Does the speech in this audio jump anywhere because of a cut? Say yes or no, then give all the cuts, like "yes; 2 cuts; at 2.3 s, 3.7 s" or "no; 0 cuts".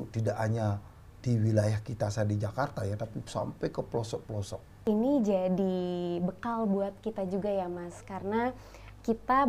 yes; 1 cut; at 4.7 s